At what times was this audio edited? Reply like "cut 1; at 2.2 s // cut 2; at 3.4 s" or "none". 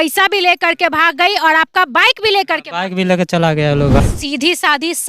cut 1; at 4.2 s